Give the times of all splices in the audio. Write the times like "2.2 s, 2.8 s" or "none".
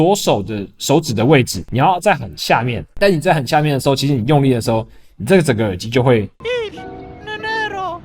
1.6 s, 2.8 s